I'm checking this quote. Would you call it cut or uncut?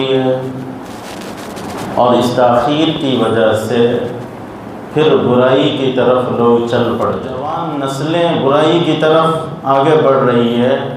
cut